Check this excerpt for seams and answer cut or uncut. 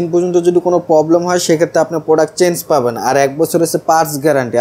uncut